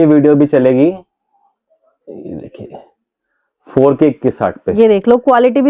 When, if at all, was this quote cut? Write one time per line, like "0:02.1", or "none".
none